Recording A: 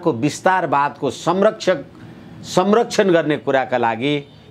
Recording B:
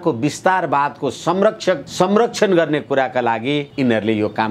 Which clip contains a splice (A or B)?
B